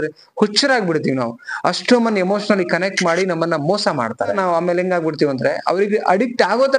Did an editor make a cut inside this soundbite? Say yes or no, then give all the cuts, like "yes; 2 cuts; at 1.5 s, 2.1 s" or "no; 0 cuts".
yes; 1 cut; at 4.3 s